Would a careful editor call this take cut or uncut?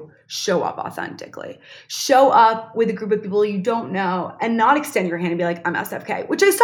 uncut